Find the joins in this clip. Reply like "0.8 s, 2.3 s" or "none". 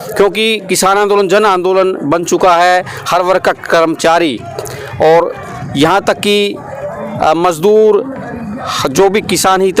none

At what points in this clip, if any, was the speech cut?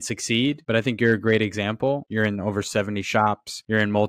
2.1 s

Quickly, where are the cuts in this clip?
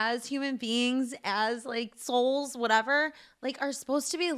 none

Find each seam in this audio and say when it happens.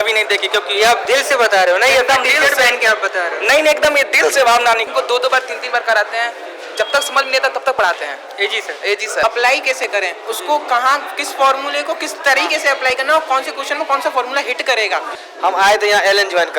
4.9 s, 9.2 s, 15.2 s

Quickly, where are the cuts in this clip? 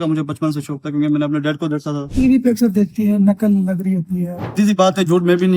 2.1 s, 4.5 s

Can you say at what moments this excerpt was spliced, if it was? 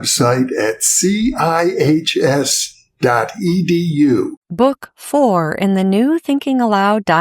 4.4 s

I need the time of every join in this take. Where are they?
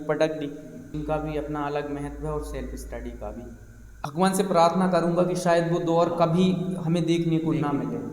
0.9 s, 4.1 s

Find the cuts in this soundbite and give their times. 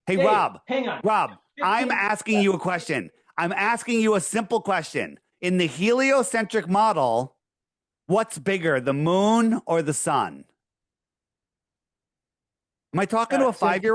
none

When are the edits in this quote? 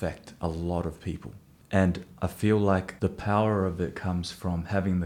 2.0 s, 2.9 s

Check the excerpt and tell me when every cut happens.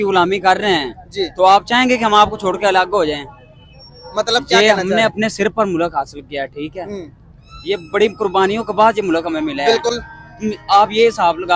none

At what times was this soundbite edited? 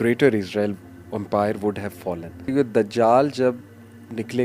2.5 s

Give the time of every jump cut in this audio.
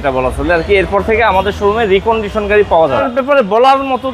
3.1 s

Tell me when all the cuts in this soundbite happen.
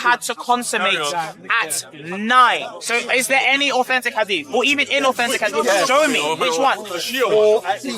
2.7 s

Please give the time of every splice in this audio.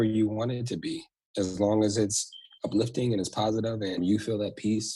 4.0 s

